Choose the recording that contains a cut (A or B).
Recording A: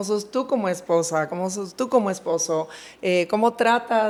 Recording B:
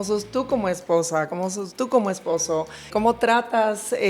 B